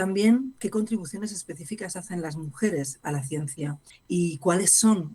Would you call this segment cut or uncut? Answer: cut